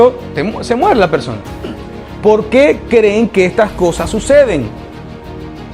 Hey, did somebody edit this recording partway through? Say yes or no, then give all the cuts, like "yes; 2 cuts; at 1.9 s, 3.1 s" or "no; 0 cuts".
no; 0 cuts